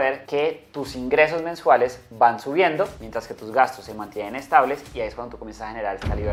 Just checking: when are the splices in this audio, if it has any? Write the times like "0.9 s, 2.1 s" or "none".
none